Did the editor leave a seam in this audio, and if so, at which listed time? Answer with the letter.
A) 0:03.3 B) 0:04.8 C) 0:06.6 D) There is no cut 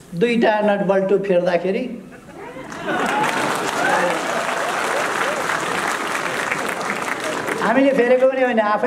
D